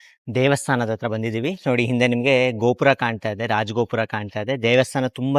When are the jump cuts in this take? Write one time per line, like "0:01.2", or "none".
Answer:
none